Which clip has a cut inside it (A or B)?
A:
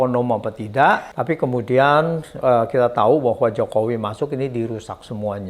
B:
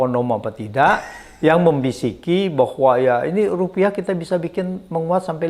A